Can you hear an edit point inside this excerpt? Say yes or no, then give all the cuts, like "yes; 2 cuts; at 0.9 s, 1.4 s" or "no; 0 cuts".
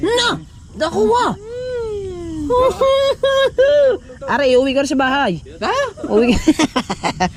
no; 0 cuts